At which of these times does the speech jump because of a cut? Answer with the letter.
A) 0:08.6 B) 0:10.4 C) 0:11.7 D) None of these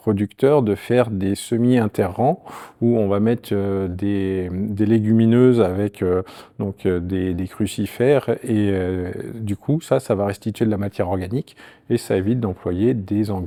D